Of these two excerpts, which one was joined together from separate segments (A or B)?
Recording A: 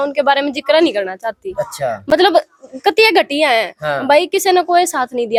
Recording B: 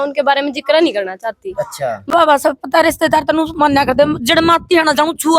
B